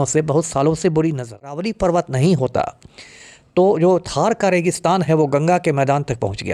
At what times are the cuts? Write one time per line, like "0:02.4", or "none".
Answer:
0:01.7